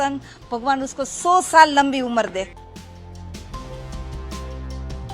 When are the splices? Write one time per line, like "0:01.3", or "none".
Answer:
0:02.5